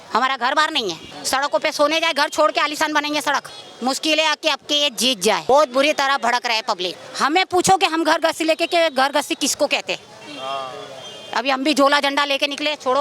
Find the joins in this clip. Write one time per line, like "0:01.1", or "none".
0:01.1
0:03.6
0:05.5
0:07.0